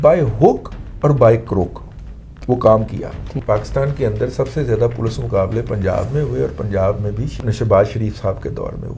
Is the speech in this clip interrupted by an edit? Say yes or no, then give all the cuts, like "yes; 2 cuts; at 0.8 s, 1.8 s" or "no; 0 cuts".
yes; 2 cuts; at 3.4 s, 7.4 s